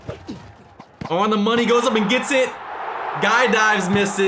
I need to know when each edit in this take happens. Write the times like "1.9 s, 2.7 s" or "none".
none